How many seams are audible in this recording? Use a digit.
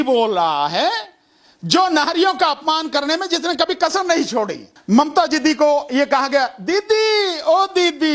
1